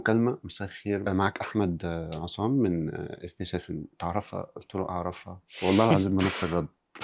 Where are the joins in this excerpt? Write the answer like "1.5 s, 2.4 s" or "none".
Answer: 1.0 s